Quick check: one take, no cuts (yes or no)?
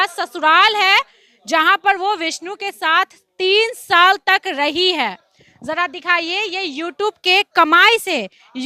yes